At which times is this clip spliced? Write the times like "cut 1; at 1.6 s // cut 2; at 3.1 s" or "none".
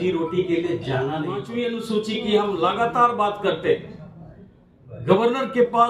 cut 1; at 1.5 s